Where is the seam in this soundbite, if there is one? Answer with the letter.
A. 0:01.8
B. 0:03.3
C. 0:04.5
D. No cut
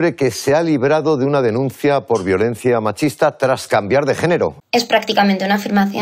C